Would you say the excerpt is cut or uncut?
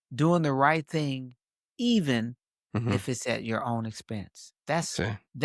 uncut